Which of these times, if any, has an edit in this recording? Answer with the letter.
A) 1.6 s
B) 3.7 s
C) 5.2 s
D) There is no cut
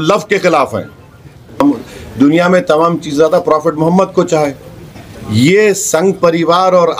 A